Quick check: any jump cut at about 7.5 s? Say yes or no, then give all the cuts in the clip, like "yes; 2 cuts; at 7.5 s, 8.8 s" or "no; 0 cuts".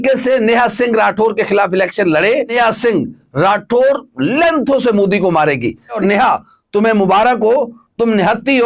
no; 2 cuts; at 2.5 s, 6.0 s